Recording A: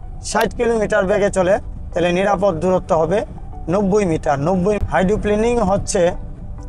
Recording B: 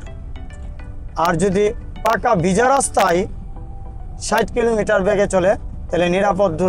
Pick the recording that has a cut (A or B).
A